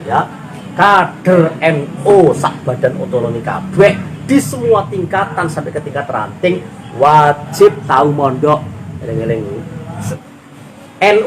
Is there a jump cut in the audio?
yes; 1 cut; at 10.2 s

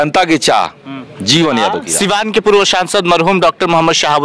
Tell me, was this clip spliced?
yes; 1 cut; at 1.8 s

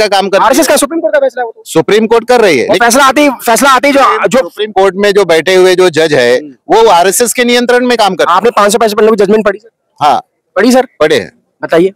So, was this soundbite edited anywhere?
no; 0 cuts

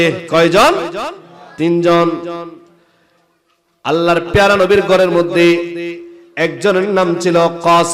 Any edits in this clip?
no; 0 cuts

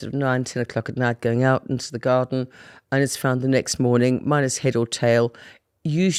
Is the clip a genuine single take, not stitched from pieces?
yes; 0 cuts

